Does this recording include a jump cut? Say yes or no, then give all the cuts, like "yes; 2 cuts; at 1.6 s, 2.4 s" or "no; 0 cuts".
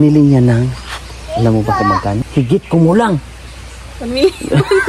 yes; 1 cut; at 2.2 s